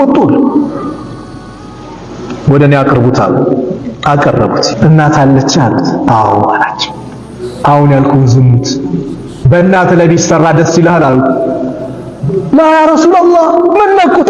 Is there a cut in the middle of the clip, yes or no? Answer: yes